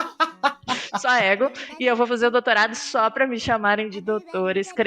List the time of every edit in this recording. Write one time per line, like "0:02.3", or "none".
0:00.9

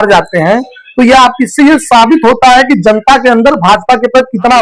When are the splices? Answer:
none

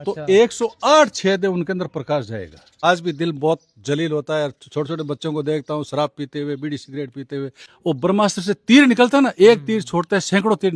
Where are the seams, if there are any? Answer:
0:02.8
0:07.6

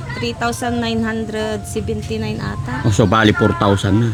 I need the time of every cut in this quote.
none

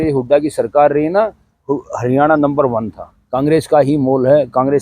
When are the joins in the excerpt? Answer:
0:03.5

